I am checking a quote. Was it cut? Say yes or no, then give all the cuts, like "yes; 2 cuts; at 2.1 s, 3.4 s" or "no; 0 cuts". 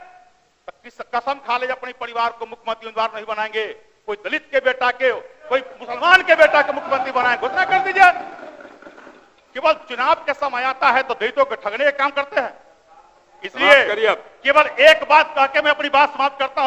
no; 0 cuts